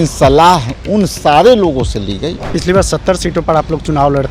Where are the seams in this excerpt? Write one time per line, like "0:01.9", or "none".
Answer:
0:02.6